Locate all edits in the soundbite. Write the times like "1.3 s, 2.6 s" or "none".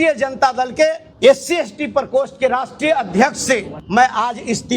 1.1 s, 3.8 s